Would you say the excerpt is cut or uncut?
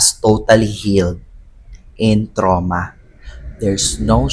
uncut